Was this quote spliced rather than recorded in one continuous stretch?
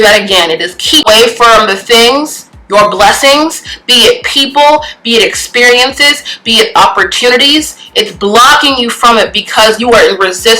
yes; 1 cut; at 1.1 s

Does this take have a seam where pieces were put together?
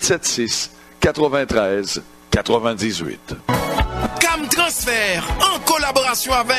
yes; 1 cut; at 3.3 s

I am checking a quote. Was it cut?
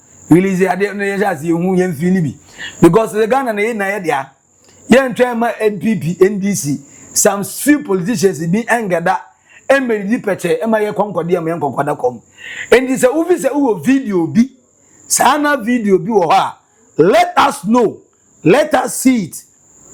no; 0 cuts

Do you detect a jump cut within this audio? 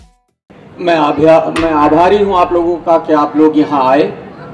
no; 0 cuts

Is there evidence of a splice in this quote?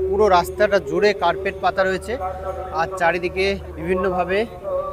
no; 0 cuts

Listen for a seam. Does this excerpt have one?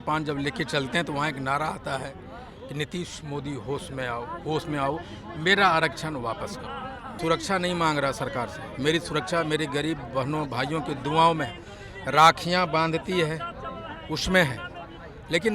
yes; 1 cut; at 7.1 s

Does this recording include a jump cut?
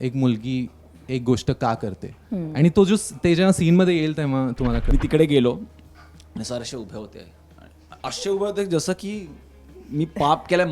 yes; 1 cut; at 4.9 s

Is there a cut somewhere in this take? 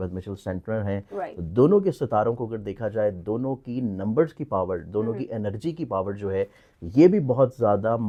no; 0 cuts

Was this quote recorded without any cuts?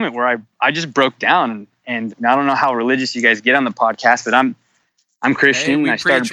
yes; 0 cuts

